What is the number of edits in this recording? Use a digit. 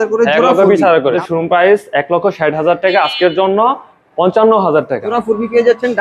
2